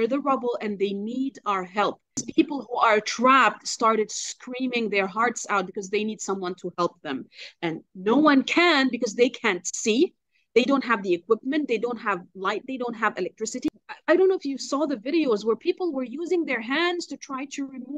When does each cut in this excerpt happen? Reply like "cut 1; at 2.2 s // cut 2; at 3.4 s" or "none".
cut 1; at 2.2 s // cut 2; at 13.7 s